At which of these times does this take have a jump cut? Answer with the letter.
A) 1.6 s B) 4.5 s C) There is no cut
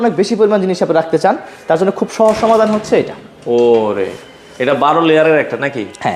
C